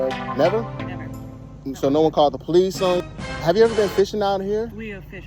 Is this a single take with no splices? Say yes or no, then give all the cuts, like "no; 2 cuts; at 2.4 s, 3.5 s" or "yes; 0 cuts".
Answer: no; 1 cut; at 3.1 s